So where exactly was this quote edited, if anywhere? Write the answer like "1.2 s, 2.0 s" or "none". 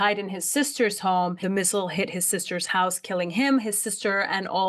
1.4 s